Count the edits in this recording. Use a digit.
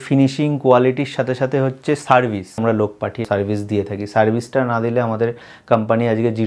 1